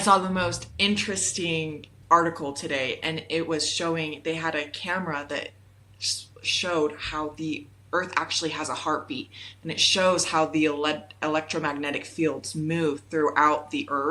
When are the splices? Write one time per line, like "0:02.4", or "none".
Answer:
none

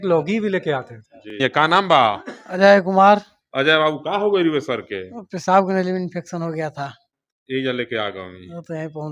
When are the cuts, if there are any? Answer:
0:01.4

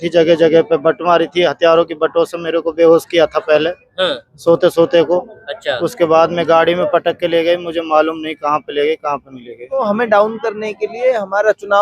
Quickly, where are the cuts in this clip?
0:09.8

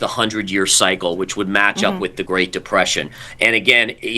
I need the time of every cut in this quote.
none

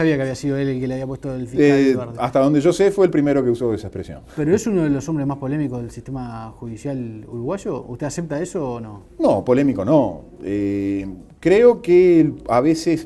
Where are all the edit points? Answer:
0:08.8

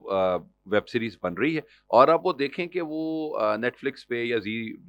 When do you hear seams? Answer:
none

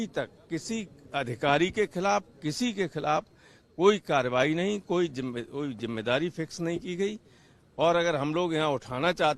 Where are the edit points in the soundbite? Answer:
none

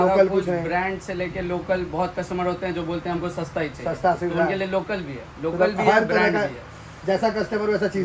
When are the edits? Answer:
none

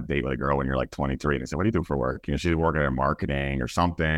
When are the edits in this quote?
none

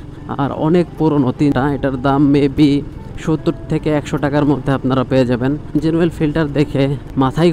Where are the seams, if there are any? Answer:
0:01.5
0:05.7

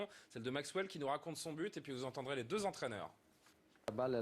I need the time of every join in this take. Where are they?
0:00.9

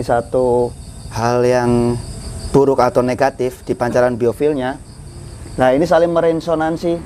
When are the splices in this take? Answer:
0:01.1

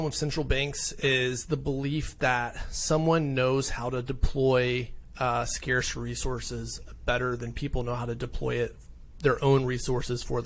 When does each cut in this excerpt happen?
none

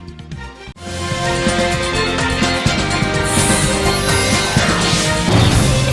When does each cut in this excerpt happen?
none

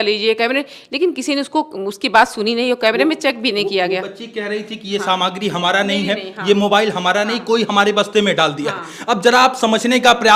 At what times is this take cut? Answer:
none

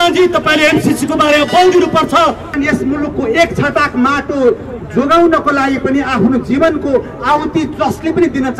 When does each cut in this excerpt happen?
0:02.5

